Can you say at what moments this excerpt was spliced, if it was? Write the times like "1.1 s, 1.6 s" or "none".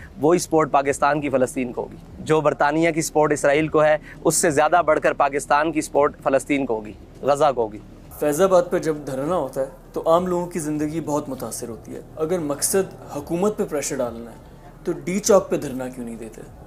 none